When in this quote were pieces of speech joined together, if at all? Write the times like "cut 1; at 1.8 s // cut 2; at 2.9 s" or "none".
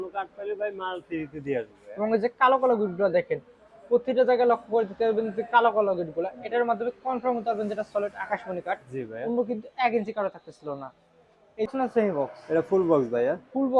cut 1; at 11.7 s